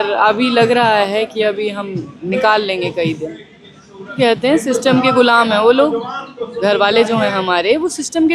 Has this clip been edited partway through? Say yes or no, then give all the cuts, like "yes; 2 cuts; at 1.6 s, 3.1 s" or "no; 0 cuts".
yes; 1 cut; at 4.1 s